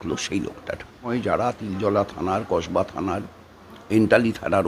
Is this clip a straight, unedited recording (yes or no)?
no